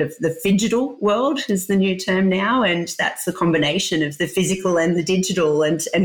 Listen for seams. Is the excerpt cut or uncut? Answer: uncut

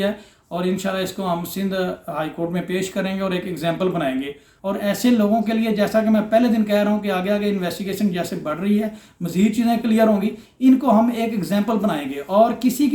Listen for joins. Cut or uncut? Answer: uncut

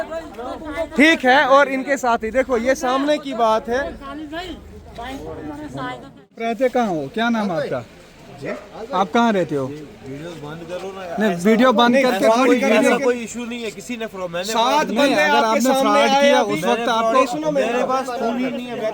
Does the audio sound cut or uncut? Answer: cut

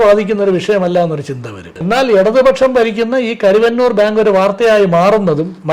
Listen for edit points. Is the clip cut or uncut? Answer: cut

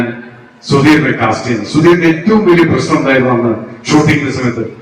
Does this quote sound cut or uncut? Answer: uncut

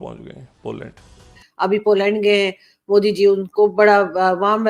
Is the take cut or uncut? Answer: cut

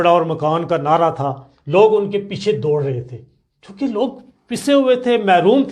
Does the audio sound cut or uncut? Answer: uncut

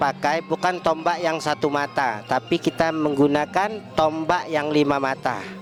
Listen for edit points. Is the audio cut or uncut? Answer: uncut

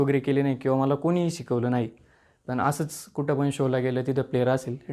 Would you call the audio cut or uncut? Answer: uncut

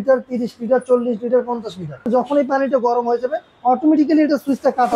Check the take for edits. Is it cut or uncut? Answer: cut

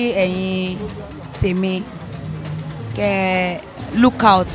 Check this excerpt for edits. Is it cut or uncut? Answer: uncut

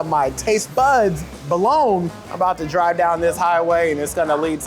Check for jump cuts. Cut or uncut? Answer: cut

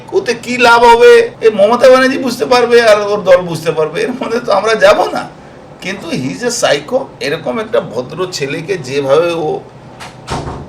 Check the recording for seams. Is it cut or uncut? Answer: cut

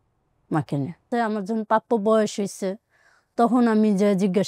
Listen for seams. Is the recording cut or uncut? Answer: cut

